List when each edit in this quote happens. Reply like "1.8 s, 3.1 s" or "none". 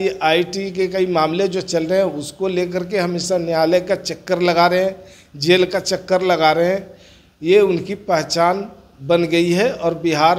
none